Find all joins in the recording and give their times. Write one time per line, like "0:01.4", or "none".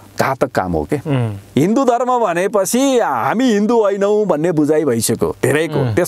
0:01.4